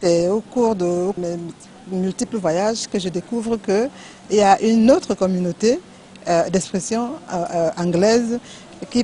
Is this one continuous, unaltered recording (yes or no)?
no